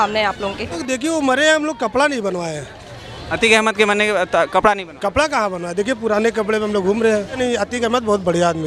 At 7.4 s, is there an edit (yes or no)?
yes